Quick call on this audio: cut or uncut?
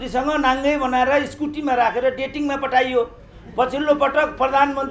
uncut